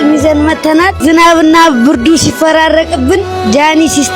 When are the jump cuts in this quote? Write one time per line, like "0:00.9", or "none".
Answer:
0:01.0